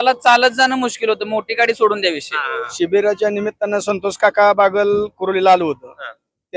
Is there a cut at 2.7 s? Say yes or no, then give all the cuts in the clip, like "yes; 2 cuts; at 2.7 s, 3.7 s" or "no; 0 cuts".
yes; 1 cut; at 2.7 s